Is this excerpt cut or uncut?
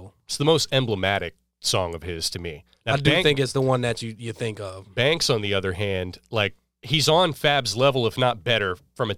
cut